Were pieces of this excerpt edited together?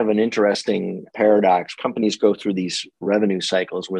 yes; 2 cuts; at 1.0 s, 1.7 s

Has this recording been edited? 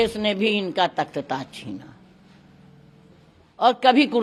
no; 0 cuts

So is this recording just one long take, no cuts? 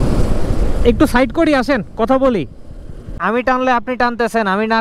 no; 1 cut; at 3.1 s

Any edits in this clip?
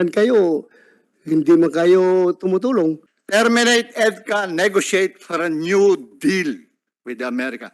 yes; 1 cut; at 3.1 s

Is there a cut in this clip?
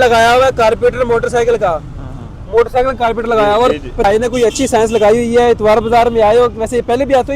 yes; 1 cut; at 4.0 s

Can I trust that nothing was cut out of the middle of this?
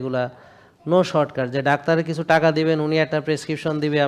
yes; 0 cuts

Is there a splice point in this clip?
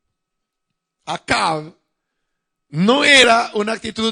yes; 1 cut; at 1.2 s

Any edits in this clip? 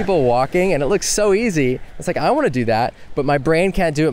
no; 0 cuts

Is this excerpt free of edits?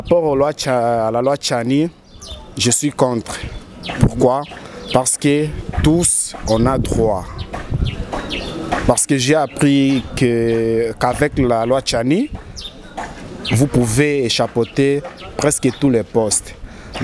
yes; 0 cuts

